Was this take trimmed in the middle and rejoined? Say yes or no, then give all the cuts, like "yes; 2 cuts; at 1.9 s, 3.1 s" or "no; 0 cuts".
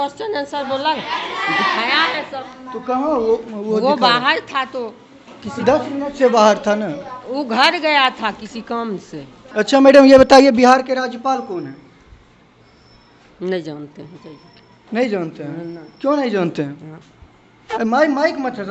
yes; 1 cut; at 9.4 s